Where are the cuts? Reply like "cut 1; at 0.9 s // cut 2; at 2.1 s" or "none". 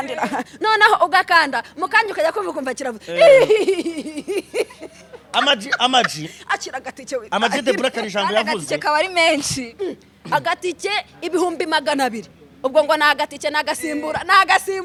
none